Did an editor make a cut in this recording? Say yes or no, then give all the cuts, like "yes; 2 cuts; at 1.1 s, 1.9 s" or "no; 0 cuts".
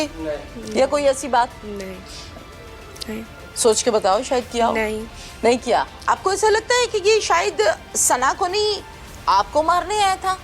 yes; 2 cuts; at 1.6 s, 6.0 s